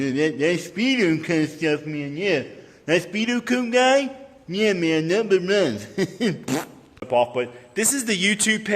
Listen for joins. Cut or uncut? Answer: cut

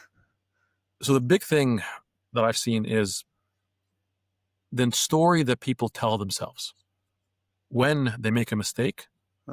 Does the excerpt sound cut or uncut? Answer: uncut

